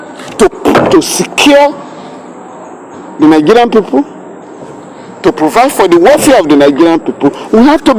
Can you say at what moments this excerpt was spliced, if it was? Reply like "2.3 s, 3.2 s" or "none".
none

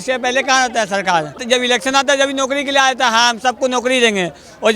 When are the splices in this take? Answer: 1.3 s

